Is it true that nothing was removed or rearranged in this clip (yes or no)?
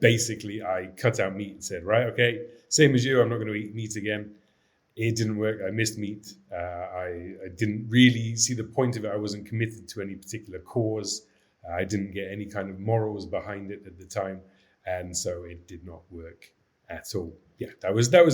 no